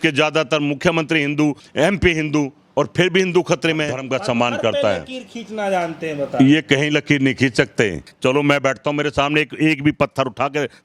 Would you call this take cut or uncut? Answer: cut